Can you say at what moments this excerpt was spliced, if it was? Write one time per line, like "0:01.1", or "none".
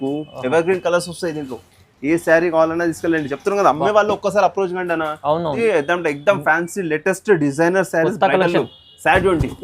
0:05.6